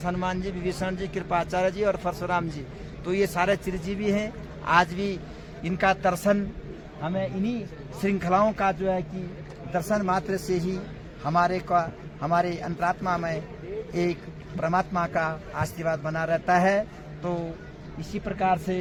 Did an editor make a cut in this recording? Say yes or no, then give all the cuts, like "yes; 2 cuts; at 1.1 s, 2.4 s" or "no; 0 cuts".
no; 0 cuts